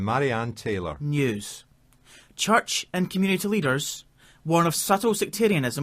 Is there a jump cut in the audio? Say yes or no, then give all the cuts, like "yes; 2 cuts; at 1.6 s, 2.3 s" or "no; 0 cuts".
yes; 1 cut; at 1.0 s